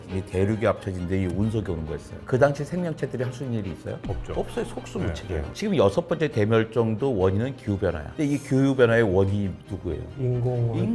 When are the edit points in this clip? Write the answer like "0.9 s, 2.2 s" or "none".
none